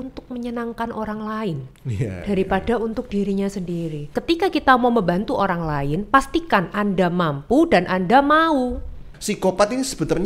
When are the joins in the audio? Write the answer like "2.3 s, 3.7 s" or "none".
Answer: 4.1 s, 9.1 s